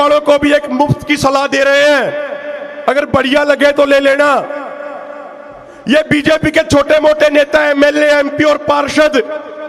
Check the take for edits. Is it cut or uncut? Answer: uncut